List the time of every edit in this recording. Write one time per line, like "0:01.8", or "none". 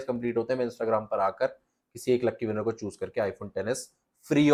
none